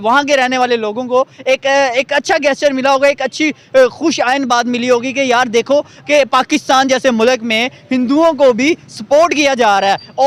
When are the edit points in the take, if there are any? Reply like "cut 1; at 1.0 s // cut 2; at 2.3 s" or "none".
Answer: none